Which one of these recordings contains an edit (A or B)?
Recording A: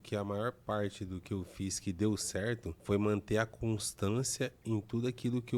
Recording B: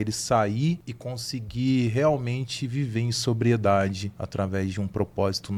A